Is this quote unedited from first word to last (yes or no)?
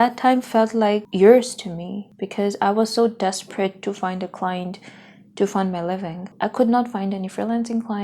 no